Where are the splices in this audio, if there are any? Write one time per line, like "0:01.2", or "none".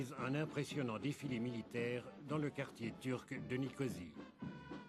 0:02.7